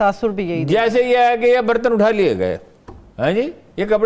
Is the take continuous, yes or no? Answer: yes